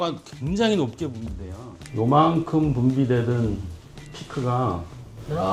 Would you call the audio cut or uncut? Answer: uncut